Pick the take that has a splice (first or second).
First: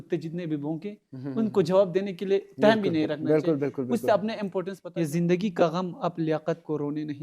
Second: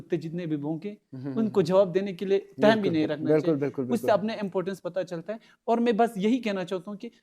first